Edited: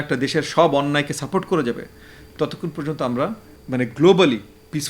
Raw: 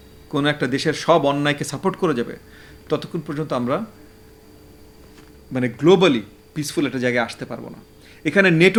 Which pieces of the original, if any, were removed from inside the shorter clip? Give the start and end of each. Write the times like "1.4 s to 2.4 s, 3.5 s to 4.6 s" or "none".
4.0 s to 5.3 s